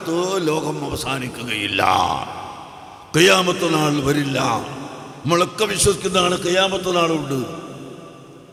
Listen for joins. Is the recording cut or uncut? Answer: uncut